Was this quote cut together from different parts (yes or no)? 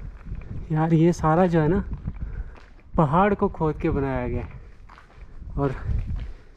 no